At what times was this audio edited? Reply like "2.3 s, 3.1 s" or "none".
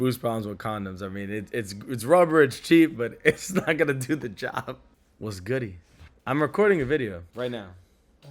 4.7 s